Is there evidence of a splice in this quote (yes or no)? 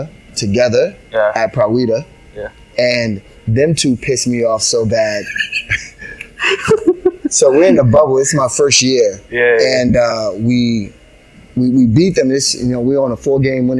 no